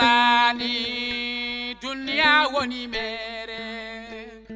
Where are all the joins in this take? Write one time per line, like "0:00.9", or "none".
none